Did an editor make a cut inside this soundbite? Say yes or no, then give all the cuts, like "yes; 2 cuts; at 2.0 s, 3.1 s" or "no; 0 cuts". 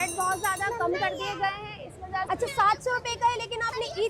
yes; 1 cut; at 2.3 s